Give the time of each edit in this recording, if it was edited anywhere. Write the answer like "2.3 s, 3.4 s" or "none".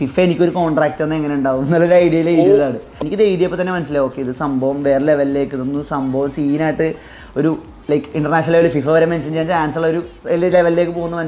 3.0 s